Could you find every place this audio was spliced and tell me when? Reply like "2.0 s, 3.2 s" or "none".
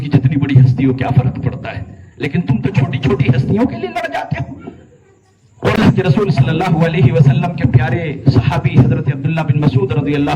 5.8 s